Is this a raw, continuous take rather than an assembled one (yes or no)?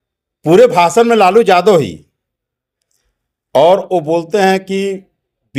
yes